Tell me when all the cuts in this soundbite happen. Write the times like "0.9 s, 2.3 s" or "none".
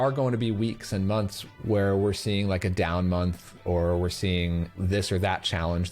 1.4 s

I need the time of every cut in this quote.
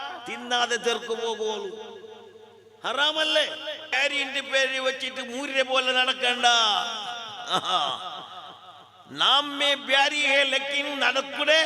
3.9 s

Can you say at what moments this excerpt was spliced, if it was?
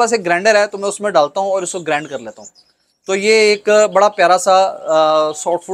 none

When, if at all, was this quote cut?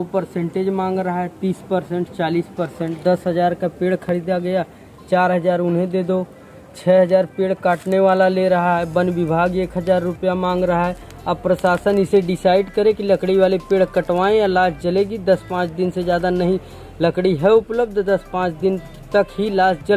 none

